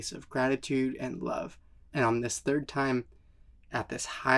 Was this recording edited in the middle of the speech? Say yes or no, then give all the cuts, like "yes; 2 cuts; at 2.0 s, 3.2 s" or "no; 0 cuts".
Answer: no; 0 cuts